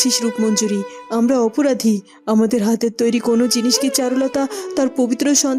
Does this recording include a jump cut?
no; 0 cuts

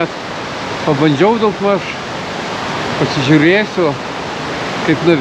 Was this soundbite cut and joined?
no; 0 cuts

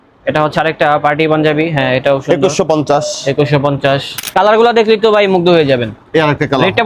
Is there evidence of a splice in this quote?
yes; 1 cut; at 4.2 s

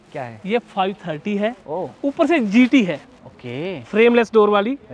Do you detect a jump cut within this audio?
no; 0 cuts

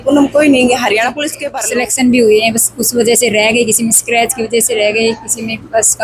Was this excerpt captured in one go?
no; 1 cut; at 1.3 s

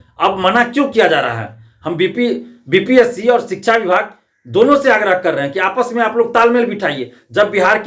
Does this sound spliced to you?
no; 0 cuts

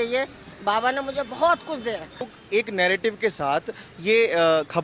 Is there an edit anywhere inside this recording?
yes; 1 cut; at 2.4 s

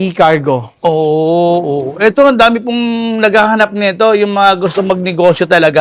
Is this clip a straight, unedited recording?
yes; 0 cuts

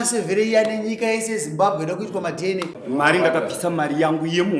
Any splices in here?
yes; 1 cut; at 2.8 s

